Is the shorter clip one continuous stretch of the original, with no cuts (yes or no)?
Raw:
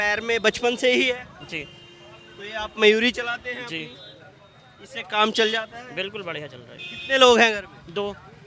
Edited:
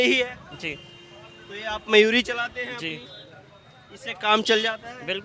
yes